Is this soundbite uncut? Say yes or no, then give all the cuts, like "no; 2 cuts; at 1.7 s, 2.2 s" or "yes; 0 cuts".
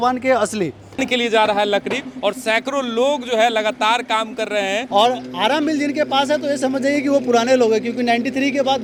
yes; 0 cuts